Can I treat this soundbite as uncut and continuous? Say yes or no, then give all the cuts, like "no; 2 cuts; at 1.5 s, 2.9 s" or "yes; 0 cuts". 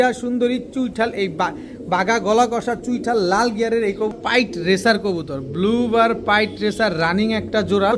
no; 1 cut; at 4.1 s